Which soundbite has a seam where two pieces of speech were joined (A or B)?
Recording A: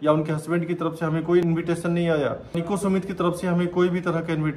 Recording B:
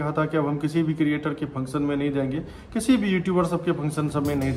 A